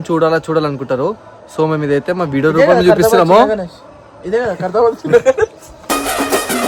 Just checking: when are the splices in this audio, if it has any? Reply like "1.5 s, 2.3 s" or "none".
none